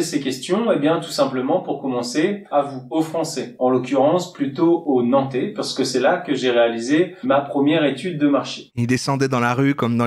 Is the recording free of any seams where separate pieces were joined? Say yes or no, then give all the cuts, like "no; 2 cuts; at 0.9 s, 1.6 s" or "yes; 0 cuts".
yes; 0 cuts